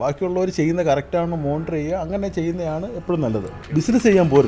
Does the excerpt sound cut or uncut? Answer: cut